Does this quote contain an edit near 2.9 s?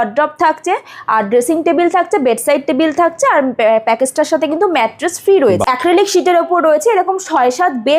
no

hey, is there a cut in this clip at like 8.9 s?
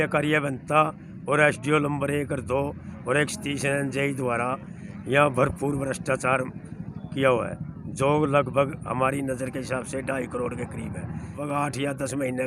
no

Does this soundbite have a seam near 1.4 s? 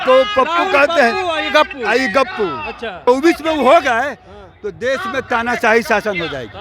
no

